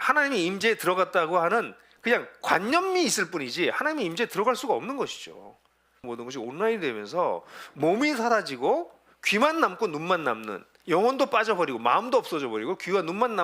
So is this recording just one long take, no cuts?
no; 1 cut; at 6.0 s

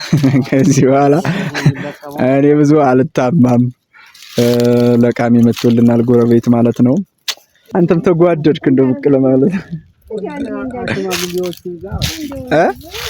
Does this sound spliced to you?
no; 0 cuts

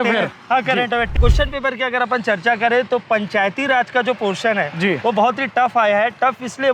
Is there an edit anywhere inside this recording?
yes; 1 cut; at 1.1 s

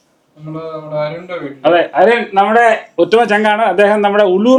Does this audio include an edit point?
no; 0 cuts

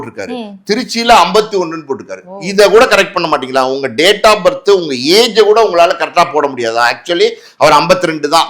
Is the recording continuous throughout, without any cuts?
yes; 0 cuts

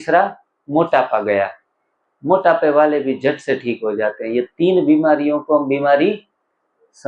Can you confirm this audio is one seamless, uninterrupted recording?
yes; 0 cuts

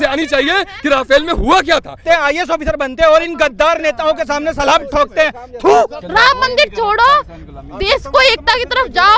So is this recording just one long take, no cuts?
no; 2 cuts; at 2.0 s, 5.9 s

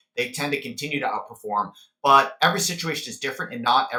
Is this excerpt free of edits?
yes; 0 cuts

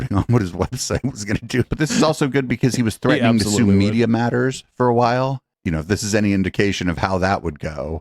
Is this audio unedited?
no; 1 cut; at 1.7 s

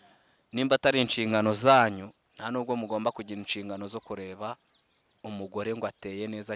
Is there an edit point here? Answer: no; 0 cuts

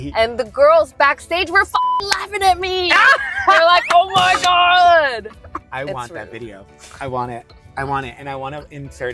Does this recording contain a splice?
no; 0 cuts

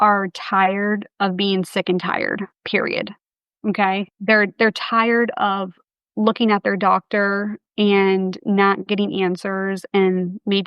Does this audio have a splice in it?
yes; 1 cut; at 2.6 s

